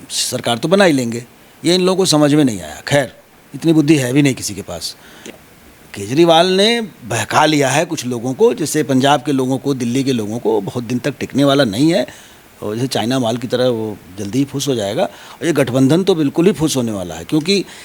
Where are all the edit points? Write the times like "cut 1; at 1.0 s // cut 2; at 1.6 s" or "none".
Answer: cut 1; at 5.3 s